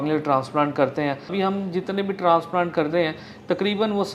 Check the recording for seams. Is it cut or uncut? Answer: cut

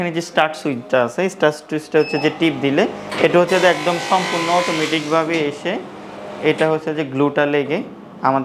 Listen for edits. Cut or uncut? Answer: uncut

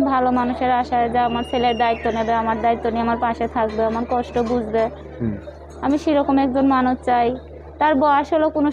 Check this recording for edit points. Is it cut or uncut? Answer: uncut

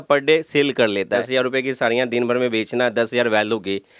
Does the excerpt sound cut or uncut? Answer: cut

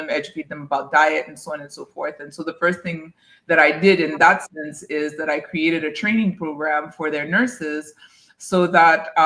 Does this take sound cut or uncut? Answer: uncut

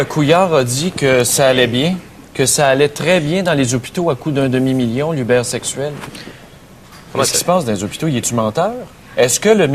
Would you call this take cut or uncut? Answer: uncut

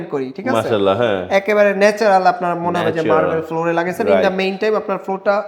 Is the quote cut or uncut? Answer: uncut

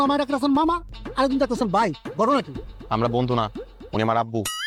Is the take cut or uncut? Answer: uncut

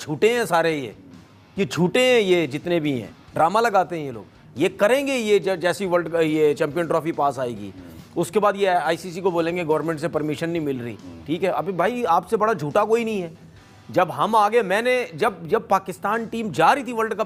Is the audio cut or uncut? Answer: uncut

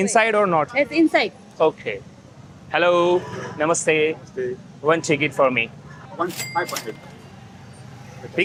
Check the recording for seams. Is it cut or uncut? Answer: uncut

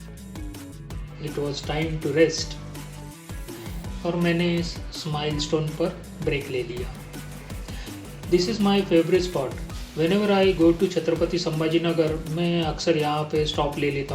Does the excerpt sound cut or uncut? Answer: uncut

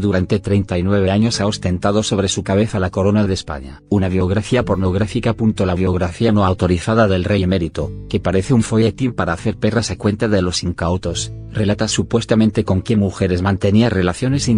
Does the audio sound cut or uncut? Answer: cut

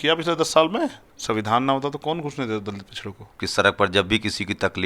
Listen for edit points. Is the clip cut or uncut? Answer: cut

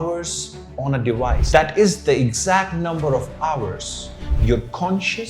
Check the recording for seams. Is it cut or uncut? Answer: cut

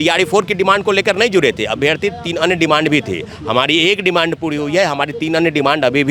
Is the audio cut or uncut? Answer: uncut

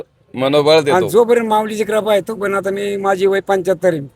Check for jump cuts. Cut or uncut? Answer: cut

